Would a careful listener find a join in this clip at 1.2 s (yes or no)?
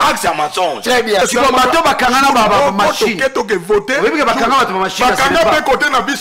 yes